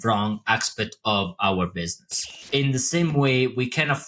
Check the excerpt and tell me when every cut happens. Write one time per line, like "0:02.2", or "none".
0:02.3